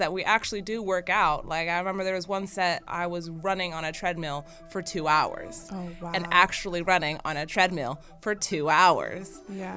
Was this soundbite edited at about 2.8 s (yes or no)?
yes